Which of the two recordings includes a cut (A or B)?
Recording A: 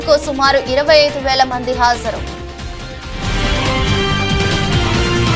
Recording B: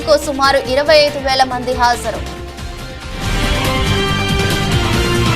A